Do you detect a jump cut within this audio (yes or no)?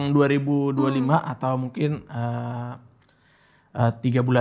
no